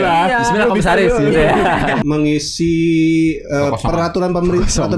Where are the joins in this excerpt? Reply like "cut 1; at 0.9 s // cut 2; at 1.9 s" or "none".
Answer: cut 1; at 2.0 s